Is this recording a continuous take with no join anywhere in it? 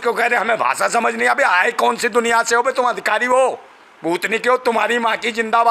yes; 0 cuts

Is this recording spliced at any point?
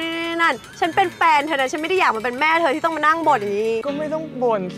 yes; 1 cut; at 3.8 s

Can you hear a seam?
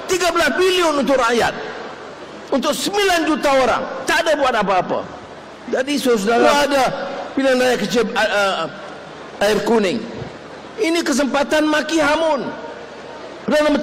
yes; 1 cut; at 6.4 s

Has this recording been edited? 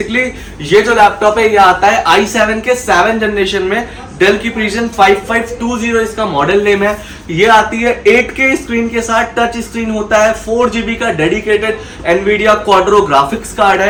no; 0 cuts

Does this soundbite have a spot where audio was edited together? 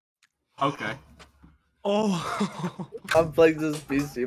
yes; 1 cut; at 3.1 s

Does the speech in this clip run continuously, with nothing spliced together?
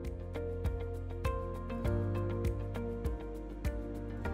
yes; 0 cuts

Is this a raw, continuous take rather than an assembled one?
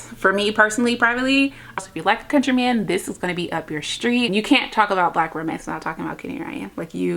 no; 2 cuts; at 1.8 s, 4.3 s

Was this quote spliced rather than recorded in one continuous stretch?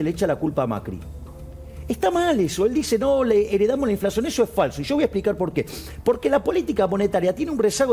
no; 0 cuts

